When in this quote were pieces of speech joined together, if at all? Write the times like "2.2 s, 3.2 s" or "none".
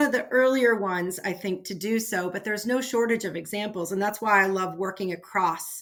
none